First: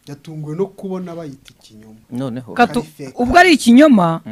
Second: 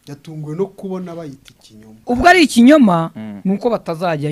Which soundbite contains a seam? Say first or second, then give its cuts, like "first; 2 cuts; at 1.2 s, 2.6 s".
second; 1 cut; at 1.9 s